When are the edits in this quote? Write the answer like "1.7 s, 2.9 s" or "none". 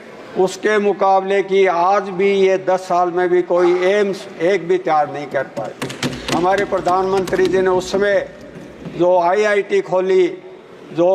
none